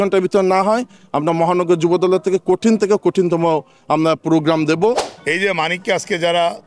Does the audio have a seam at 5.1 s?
yes; 1 cut; at 5.1 s

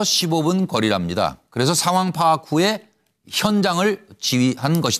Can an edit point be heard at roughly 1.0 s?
yes; 1 cut; at 1.0 s

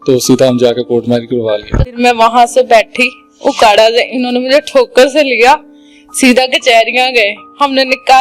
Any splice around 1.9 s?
yes; 1 cut; at 1.9 s

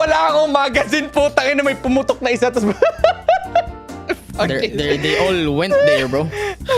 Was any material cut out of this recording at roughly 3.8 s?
no; 0 cuts

